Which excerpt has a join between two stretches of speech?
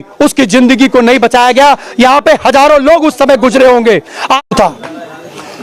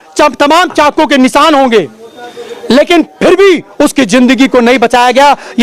first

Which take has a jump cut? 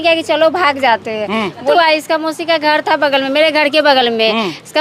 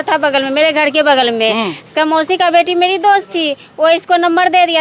first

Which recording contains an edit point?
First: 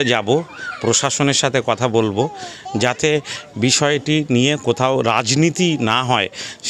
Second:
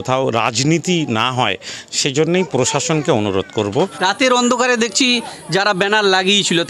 second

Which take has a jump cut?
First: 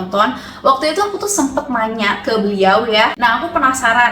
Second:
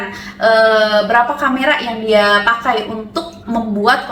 first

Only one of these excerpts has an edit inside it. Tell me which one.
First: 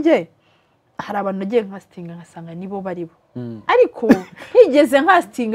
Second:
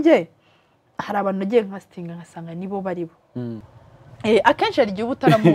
second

